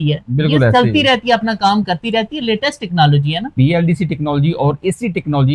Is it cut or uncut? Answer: uncut